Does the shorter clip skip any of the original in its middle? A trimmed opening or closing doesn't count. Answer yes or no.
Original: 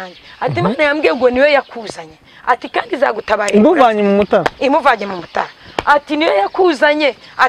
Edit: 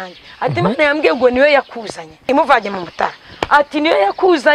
yes